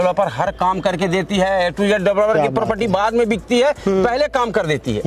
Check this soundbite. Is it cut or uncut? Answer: uncut